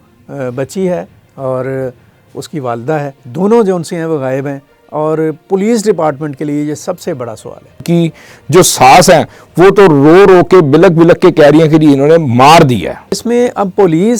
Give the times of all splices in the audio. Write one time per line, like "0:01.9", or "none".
0:01.2
0:03.2
0:07.8
0:13.2